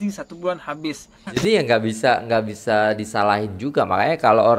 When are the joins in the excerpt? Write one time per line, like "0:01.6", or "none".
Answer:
0:01.2